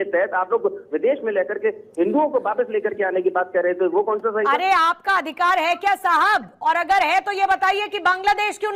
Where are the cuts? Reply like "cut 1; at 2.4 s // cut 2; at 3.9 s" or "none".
none

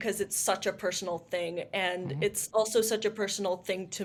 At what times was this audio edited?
none

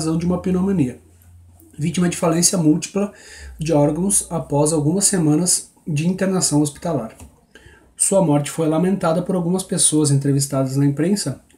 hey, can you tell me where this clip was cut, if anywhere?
cut 1; at 6.8 s

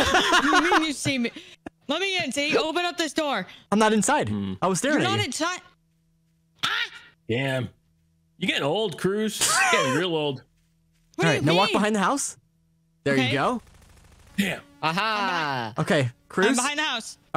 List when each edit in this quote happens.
cut 1; at 1.6 s

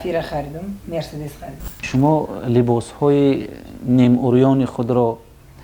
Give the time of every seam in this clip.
cut 1; at 1.9 s

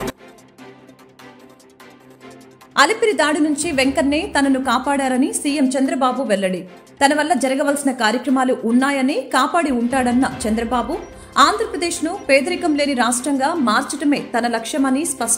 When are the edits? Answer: cut 1; at 1.4 s // cut 2; at 2.6 s

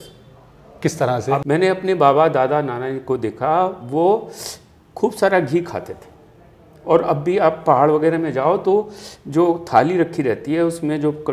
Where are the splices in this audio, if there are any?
cut 1; at 1.4 s

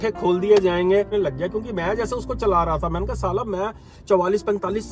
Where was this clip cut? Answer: cut 1; at 1.1 s

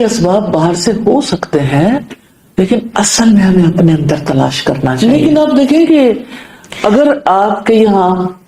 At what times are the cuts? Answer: cut 1; at 4.9 s

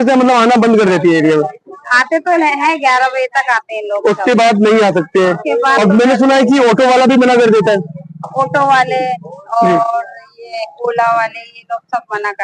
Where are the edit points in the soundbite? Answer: none

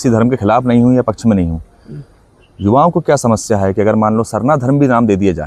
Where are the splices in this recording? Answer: none

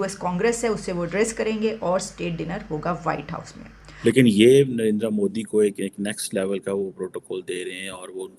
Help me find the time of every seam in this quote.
cut 1; at 3.6 s

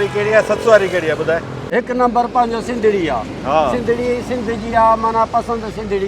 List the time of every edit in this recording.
cut 1; at 1.6 s

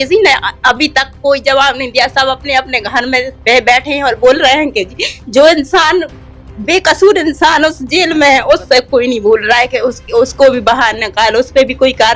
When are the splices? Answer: none

